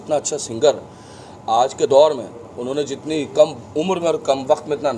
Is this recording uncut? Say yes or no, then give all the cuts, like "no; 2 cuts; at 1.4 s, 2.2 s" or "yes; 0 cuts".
yes; 0 cuts